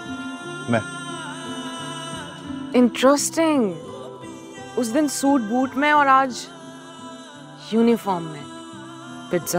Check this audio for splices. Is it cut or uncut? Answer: uncut